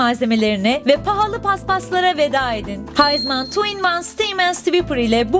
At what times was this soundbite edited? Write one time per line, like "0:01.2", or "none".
0:00.8
0:02.9